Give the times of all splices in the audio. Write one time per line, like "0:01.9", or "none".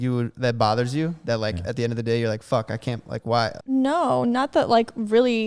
0:03.6